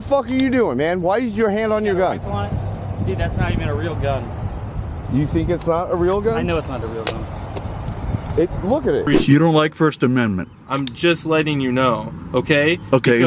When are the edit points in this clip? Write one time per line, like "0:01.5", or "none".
0:09.1